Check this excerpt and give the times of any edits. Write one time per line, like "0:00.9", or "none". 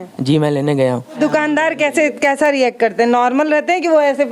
0:01.2